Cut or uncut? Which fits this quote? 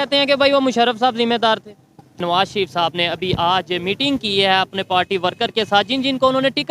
cut